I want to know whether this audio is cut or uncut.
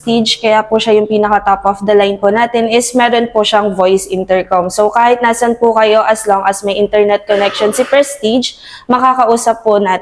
uncut